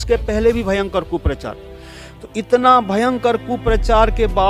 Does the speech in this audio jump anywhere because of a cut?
no; 0 cuts

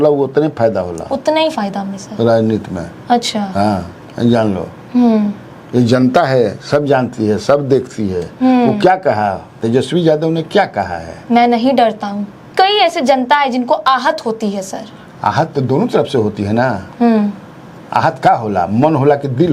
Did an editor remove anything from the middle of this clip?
yes; 1 cut; at 12.4 s

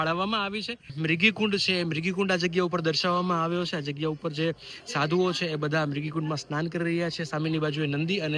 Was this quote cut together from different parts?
yes; 1 cut; at 0.9 s

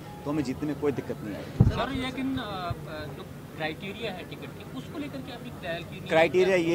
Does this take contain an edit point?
no; 0 cuts

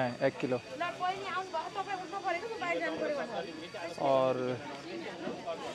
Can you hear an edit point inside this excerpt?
no; 0 cuts

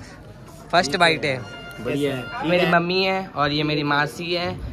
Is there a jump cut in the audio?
yes; 1 cut; at 2.5 s

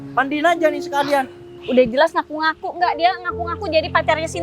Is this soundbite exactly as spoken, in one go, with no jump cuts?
no; 1 cut; at 1.5 s

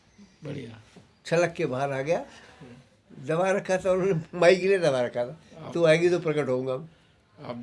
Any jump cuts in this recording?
no; 0 cuts

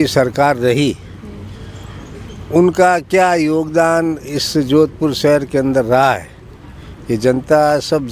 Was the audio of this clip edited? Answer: no; 0 cuts

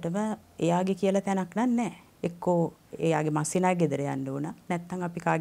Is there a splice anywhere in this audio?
yes; 1 cut; at 2.0 s

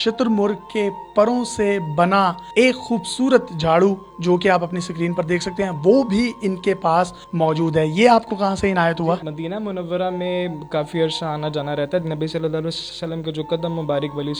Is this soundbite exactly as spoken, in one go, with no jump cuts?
yes; 0 cuts

